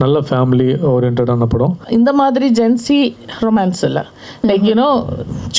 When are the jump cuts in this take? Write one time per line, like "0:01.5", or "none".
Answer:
0:01.8